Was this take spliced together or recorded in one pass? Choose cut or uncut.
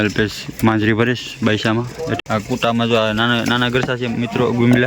cut